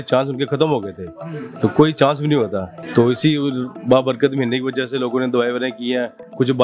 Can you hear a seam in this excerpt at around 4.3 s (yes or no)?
no